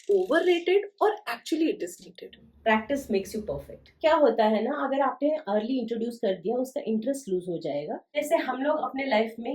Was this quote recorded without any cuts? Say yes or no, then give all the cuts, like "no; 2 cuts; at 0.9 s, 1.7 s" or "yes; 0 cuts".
no; 3 cuts; at 2.6 s, 3.9 s, 8.2 s